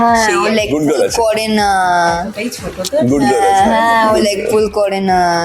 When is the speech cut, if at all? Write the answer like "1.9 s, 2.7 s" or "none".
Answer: none